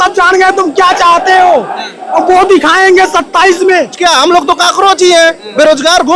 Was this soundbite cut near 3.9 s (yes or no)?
yes